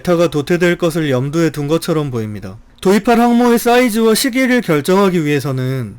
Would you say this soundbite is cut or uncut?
cut